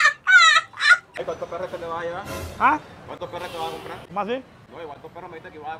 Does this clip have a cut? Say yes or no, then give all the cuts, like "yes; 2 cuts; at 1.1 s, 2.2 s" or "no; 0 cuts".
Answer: yes; 3 cuts; at 1.1 s, 4.0 s, 4.6 s